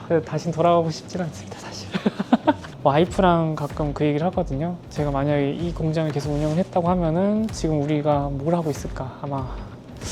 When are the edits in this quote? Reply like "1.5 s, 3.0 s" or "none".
2.7 s